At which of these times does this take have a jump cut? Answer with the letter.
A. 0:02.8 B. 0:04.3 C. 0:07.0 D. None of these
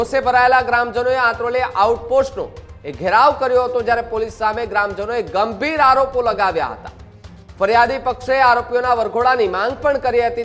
D